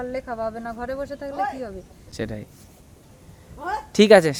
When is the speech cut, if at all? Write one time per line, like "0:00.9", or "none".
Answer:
none